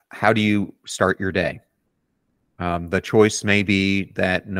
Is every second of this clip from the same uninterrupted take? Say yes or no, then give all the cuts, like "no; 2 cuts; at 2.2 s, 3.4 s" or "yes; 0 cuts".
yes; 0 cuts